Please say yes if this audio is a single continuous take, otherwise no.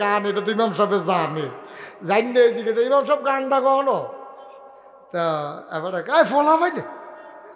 yes